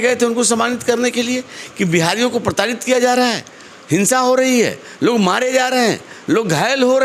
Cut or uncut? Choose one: uncut